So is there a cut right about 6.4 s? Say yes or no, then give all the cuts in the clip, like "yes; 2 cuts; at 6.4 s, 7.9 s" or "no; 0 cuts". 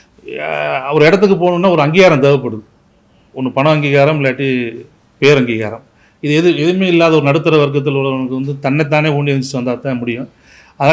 no; 0 cuts